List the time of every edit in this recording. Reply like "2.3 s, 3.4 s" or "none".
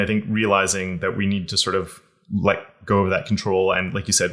none